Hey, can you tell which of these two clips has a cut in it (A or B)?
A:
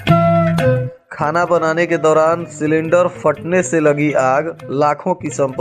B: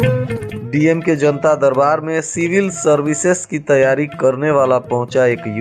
A